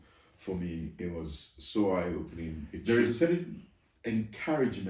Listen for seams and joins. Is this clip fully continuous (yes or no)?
no